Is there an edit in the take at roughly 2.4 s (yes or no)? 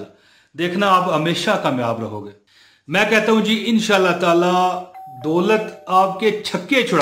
yes